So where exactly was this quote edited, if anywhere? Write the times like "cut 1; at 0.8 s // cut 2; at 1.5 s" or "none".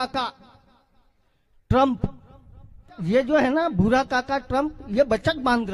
cut 1; at 2.9 s